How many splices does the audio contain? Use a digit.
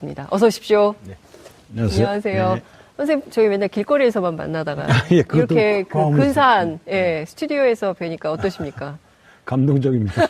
1